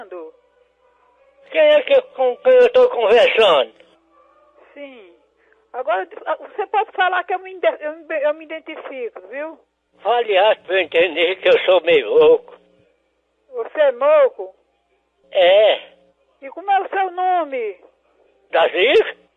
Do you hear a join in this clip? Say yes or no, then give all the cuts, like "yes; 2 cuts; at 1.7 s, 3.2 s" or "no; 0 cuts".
no; 0 cuts